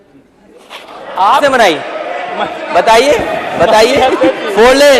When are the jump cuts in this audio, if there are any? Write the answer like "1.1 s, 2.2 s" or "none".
none